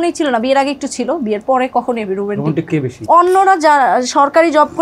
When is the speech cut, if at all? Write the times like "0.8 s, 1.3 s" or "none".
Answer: 2.9 s